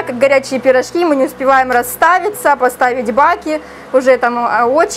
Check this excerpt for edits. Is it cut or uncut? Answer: uncut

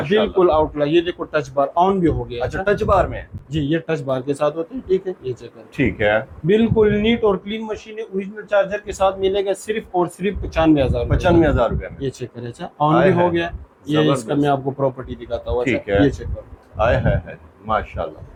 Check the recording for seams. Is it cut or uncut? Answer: uncut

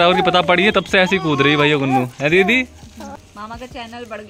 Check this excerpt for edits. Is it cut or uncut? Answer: uncut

